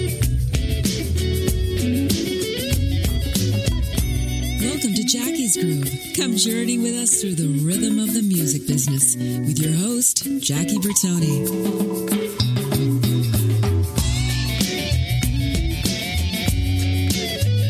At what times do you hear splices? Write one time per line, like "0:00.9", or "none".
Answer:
none